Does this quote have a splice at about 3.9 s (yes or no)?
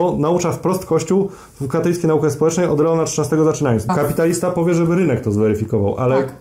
yes